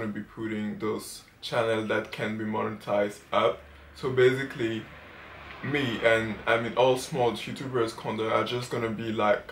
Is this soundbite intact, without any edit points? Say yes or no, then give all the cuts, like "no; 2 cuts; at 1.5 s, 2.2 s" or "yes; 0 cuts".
yes; 0 cuts